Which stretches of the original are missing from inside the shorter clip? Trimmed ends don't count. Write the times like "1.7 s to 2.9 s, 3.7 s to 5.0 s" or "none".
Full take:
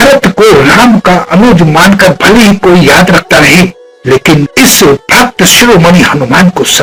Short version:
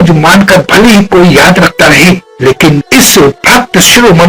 3.8 s to 3.9 s